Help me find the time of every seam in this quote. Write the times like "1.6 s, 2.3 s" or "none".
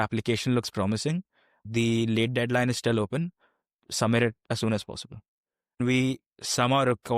1.6 s, 5.8 s